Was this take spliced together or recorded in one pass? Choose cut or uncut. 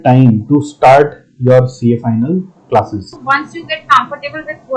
cut